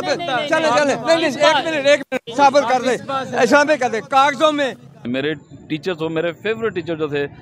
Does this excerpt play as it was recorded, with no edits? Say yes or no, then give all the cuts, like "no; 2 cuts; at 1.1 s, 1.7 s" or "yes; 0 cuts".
no; 1 cut; at 4.9 s